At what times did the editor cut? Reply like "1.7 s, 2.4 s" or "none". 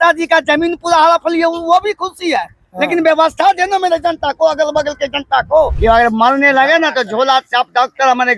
5.7 s